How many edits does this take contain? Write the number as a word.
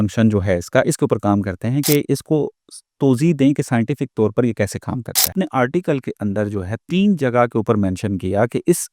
one